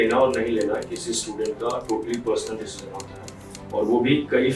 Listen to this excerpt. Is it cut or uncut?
uncut